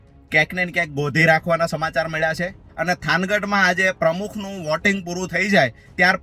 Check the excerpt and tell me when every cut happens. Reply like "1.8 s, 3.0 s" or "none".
2.6 s